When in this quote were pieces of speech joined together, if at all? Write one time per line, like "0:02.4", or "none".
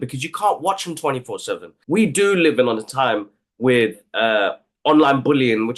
0:01.7